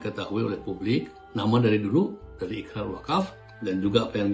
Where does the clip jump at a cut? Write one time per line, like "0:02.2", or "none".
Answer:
0:01.2
0:03.5